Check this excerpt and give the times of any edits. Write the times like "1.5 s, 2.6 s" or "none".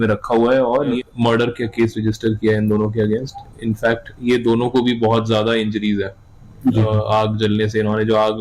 1.0 s